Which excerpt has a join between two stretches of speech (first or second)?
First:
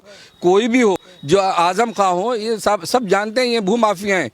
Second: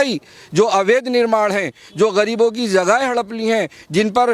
first